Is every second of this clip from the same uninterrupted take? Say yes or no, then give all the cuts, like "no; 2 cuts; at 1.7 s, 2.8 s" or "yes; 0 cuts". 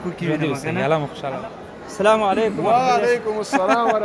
no; 1 cut; at 1.2 s